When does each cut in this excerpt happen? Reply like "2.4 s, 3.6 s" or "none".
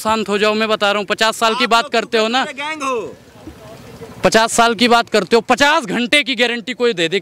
none